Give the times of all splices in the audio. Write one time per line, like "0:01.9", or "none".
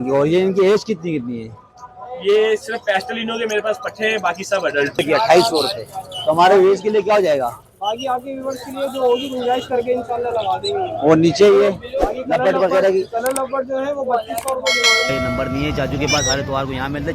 0:05.0
0:15.1